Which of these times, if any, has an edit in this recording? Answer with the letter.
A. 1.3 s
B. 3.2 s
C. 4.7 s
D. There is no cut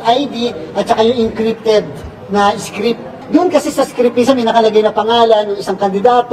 B